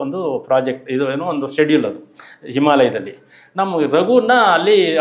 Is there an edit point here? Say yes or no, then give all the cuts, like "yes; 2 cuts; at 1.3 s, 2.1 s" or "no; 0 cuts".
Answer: no; 0 cuts